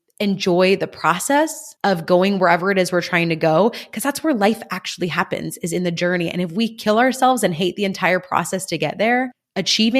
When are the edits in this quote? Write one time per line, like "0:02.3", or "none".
0:01.6